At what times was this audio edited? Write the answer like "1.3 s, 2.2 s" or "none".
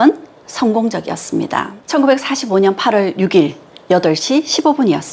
1.8 s